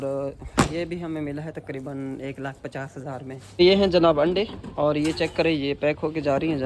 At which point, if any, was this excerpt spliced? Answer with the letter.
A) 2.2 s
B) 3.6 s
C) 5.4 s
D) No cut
B